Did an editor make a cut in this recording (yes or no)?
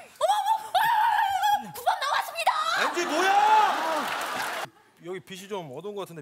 yes